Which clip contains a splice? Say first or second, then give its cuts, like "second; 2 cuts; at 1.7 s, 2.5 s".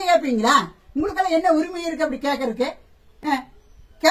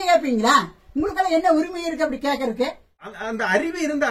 second; 1 cut; at 3.1 s